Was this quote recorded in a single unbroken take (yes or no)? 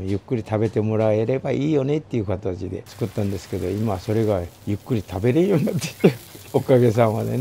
no